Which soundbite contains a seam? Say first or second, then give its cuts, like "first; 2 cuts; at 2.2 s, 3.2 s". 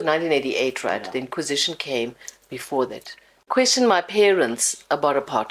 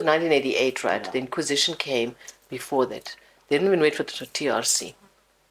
first; 1 cut; at 3.4 s